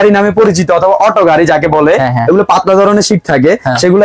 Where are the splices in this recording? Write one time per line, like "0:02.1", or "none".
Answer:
none